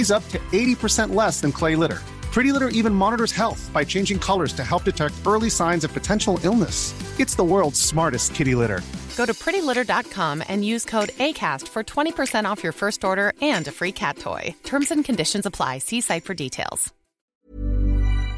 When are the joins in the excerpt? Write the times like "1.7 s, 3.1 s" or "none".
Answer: 17.2 s